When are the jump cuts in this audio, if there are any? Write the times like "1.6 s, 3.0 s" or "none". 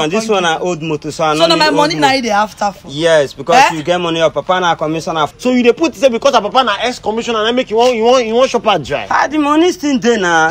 5.3 s